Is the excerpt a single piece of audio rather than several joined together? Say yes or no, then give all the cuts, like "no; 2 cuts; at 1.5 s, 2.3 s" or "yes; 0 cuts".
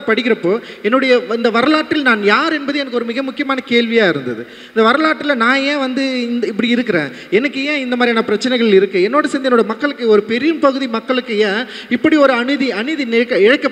yes; 0 cuts